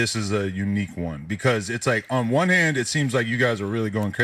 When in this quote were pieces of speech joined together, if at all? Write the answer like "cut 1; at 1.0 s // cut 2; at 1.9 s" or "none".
none